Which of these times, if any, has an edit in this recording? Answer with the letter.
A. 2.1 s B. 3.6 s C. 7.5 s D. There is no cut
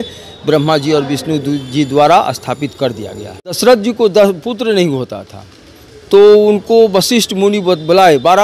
B